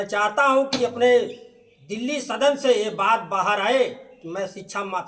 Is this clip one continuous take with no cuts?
yes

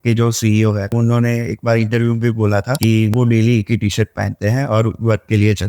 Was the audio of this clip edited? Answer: yes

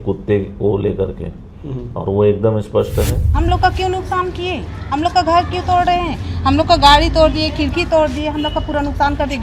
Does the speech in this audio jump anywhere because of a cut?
yes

